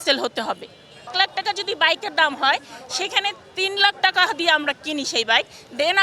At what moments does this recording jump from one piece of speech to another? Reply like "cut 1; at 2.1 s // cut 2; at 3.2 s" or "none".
cut 1; at 1.1 s